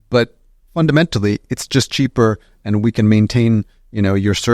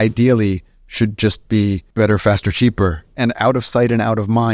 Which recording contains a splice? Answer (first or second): second